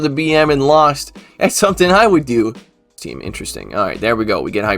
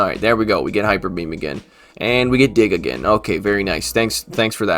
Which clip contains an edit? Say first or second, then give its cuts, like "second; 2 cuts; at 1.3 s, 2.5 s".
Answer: first; 1 cut; at 2.9 s